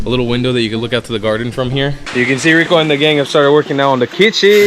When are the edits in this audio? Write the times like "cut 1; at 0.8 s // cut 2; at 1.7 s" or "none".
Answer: cut 1; at 2.0 s